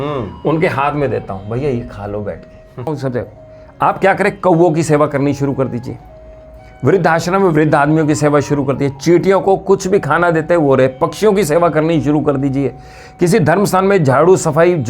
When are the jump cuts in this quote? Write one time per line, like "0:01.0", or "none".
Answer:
0:03.0